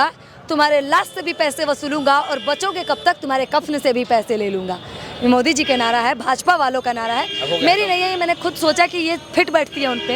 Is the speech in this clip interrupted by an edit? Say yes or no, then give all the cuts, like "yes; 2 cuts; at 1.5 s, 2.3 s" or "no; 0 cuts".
no; 0 cuts